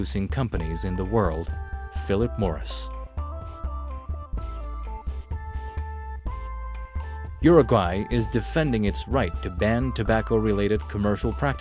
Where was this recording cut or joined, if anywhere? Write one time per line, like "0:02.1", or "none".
none